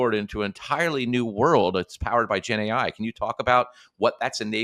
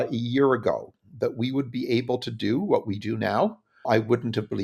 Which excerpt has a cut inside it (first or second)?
second